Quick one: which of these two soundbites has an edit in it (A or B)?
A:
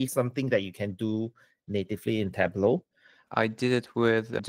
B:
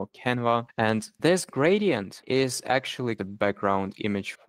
B